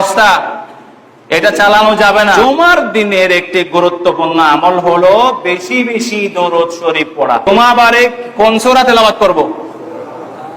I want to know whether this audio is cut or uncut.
cut